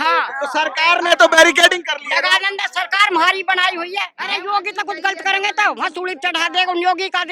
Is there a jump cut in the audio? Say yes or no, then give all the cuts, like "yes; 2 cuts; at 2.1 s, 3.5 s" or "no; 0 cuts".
yes; 1 cut; at 4.1 s